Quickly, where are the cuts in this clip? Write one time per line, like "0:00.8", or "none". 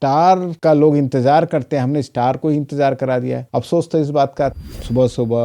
0:04.6